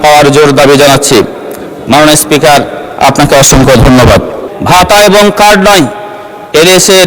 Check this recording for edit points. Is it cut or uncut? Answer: cut